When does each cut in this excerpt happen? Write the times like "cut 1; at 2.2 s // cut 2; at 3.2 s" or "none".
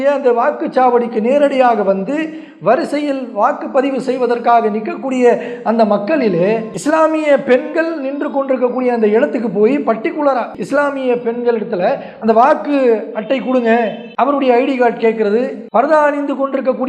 cut 1; at 10.6 s